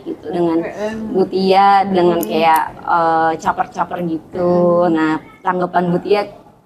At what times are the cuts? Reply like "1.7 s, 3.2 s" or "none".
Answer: none